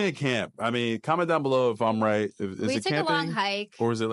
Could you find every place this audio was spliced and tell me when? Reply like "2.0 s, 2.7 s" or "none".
none